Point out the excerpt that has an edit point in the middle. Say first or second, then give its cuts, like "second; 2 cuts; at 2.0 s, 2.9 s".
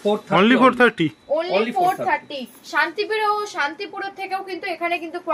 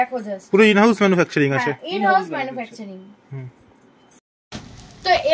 second; 1 cut; at 4.2 s